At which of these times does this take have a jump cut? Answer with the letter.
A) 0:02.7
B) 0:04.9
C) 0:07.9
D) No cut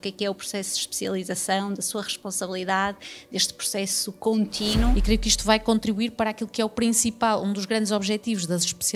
B